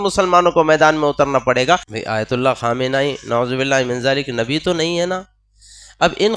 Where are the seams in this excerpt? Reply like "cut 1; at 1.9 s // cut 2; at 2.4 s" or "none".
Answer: cut 1; at 1.9 s